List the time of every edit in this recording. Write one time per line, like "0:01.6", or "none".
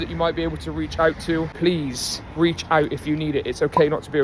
0:01.5